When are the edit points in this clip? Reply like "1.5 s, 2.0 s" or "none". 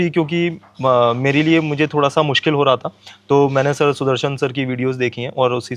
none

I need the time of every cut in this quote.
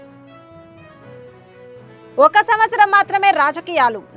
none

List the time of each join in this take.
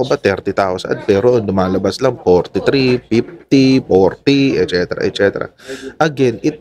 none

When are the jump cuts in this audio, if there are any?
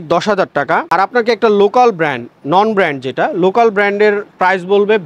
none

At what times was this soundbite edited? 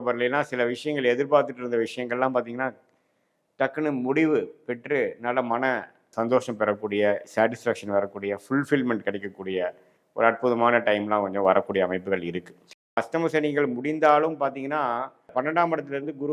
13.0 s

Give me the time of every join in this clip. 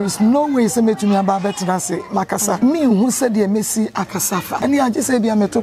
2.6 s, 4.5 s

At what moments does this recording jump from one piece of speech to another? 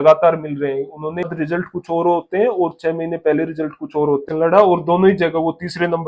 1.3 s, 4.2 s

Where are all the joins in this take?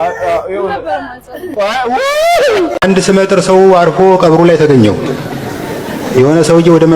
2.8 s

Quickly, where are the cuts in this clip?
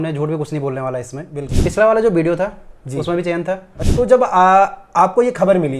1.4 s, 3.8 s

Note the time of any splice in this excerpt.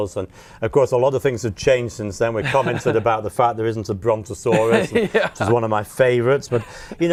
none

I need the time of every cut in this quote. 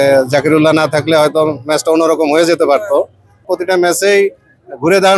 3.5 s

